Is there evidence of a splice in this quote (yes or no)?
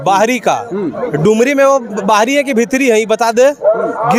no